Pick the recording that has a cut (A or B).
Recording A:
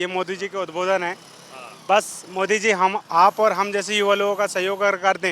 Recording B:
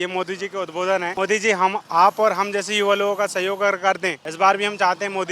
B